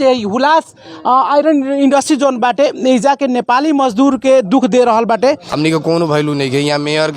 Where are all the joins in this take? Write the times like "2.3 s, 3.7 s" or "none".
5.5 s